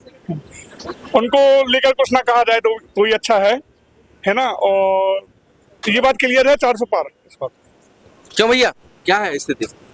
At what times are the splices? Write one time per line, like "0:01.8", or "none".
none